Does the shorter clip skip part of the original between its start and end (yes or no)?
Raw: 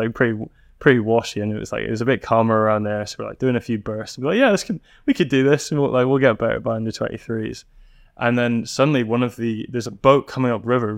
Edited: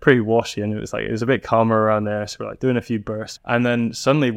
yes